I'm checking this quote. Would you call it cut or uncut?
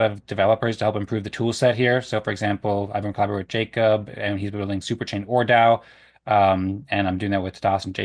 uncut